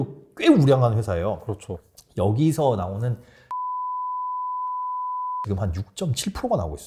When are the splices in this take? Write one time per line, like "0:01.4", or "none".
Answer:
none